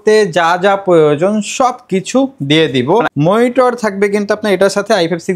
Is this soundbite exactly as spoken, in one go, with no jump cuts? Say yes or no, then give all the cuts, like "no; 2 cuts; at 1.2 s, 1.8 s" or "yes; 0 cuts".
no; 1 cut; at 3.1 s